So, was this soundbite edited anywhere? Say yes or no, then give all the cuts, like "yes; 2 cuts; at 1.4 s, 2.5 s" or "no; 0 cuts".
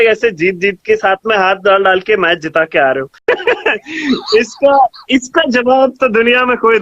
yes; 1 cut; at 3.2 s